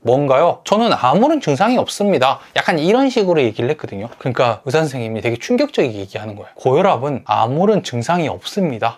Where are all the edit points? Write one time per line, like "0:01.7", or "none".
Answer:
none